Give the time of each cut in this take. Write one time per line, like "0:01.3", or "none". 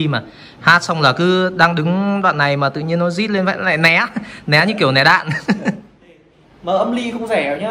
0:06.3